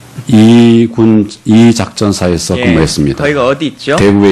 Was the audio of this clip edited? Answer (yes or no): yes